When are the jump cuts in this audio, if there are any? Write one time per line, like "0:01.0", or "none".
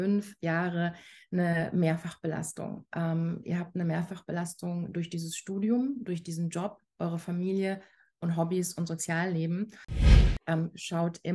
0:10.0

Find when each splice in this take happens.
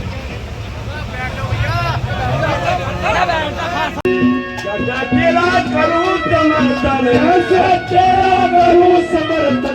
0:04.0

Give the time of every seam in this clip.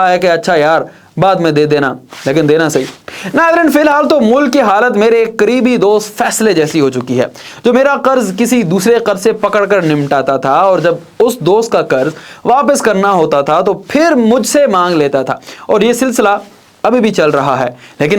none

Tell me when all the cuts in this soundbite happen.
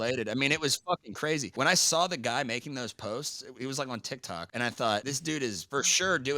0:01.5
0:04.5
0:05.2

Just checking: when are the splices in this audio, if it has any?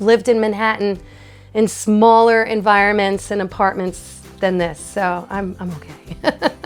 none

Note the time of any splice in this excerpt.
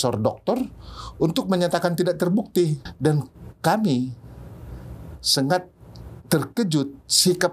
0:02.8

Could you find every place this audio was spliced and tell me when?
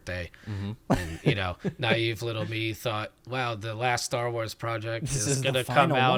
none

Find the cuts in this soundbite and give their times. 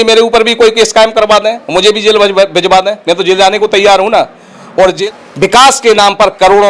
0:05.0

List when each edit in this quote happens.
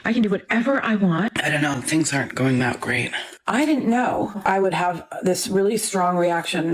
0:01.3
0:04.3

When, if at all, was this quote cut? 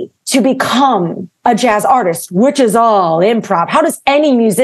none

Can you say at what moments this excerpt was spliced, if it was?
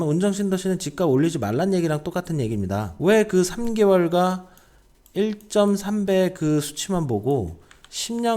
none

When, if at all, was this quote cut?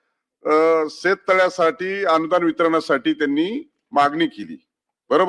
none

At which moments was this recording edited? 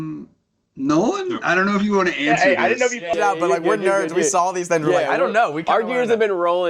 none

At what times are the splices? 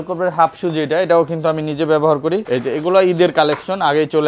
0:02.4

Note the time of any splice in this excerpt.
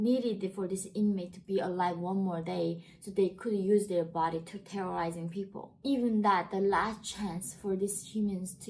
0:05.6

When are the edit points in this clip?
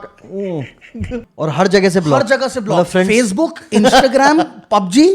0:01.3

